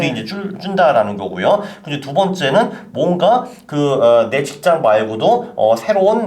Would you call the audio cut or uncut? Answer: uncut